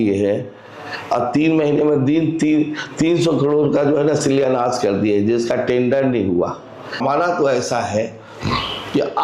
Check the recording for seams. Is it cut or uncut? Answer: cut